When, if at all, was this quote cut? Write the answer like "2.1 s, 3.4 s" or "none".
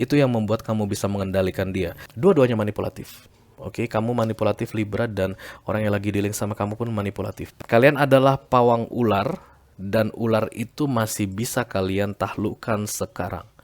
2.0 s, 7.4 s